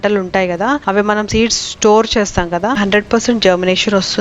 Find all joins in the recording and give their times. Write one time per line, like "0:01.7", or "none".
0:02.8